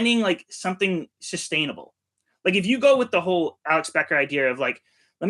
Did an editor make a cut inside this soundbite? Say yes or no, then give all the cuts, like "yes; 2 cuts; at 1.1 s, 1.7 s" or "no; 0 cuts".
yes; 1 cut; at 3.6 s